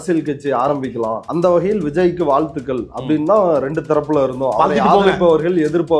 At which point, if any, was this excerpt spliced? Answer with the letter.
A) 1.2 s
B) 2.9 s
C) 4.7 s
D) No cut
A